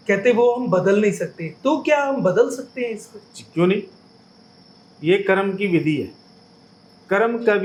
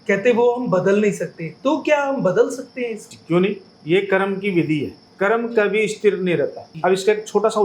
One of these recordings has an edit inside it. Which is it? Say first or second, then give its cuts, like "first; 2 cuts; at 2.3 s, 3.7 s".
second; 4 cuts; at 3.1 s, 3.7 s, 5.0 s, 6.6 s